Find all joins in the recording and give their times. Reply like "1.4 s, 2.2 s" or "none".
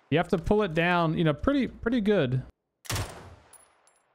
2.7 s